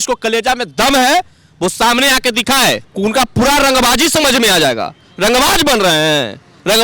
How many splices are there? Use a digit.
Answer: 1